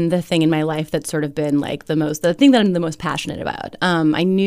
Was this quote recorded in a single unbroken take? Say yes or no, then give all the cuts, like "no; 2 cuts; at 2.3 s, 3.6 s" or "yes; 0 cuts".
yes; 0 cuts